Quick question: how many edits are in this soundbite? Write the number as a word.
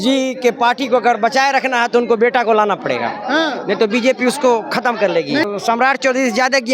one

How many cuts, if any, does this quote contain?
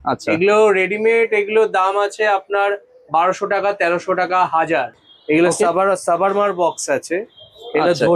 one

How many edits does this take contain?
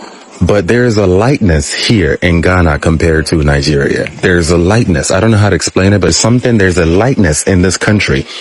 one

